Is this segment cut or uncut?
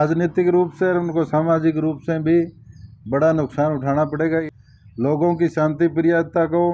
cut